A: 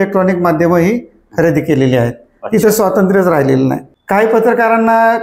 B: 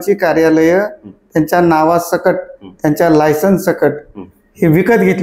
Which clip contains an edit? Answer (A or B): A